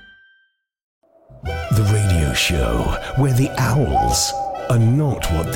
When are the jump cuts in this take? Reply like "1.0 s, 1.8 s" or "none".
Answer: 1.1 s